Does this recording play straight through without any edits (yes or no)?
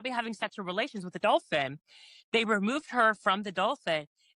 yes